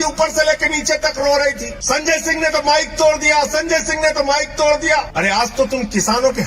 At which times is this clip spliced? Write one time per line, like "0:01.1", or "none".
0:01.7
0:05.1

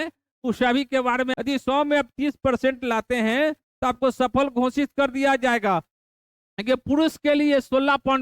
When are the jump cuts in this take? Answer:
0:01.3
0:05.9

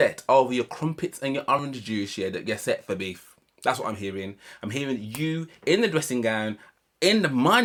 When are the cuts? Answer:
none

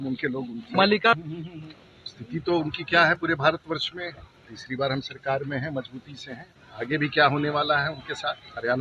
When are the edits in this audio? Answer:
0:01.2

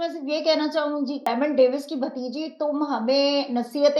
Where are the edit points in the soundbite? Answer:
0:01.2

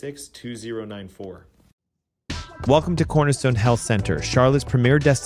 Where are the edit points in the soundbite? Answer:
0:01.5

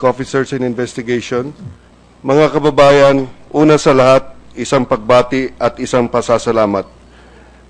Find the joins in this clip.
none

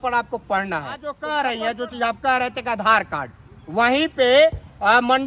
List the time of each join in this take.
0:01.1

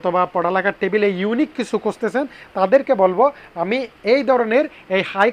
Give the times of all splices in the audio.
none

